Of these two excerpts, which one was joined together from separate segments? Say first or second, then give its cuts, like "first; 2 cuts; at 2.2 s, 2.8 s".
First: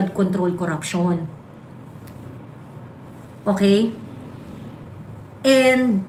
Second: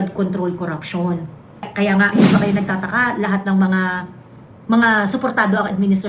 second; 1 cut; at 1.7 s